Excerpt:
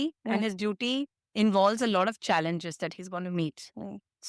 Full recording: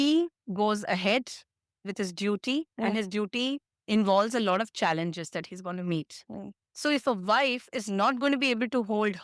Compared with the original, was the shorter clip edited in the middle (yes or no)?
no